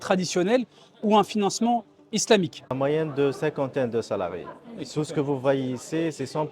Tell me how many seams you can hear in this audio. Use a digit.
1